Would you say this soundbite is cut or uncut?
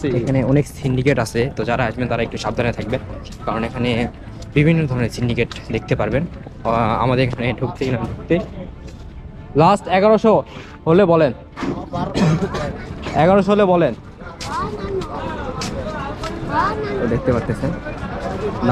uncut